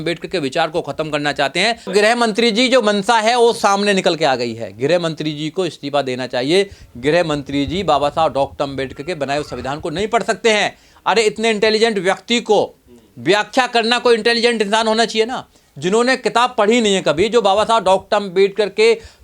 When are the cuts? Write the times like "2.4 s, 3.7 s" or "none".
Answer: 1.9 s